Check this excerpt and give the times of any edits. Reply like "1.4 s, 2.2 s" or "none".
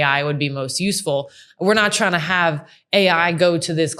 none